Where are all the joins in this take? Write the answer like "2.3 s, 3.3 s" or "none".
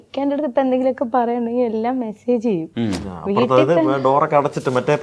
none